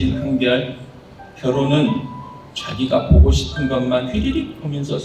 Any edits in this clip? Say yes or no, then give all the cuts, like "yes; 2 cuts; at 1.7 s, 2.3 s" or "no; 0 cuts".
no; 0 cuts